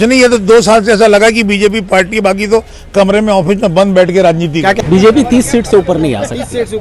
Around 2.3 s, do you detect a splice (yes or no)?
no